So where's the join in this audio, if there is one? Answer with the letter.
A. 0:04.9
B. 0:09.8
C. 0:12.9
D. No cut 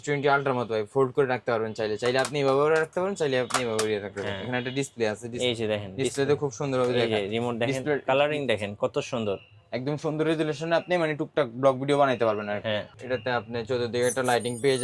C